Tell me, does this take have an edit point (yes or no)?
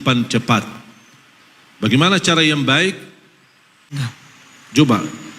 yes